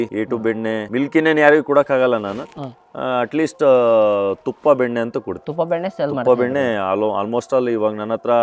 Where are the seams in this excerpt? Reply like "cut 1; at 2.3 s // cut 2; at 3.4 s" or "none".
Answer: none